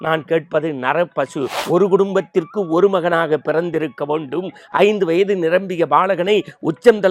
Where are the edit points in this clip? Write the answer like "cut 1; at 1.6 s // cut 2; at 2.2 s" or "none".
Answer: cut 1; at 1.6 s